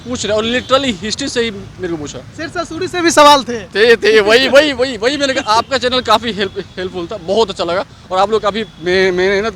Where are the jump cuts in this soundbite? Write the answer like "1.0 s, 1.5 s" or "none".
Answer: none